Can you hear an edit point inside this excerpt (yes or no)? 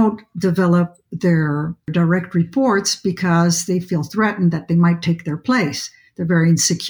yes